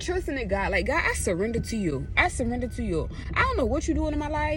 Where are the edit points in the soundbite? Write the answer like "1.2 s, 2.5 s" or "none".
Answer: none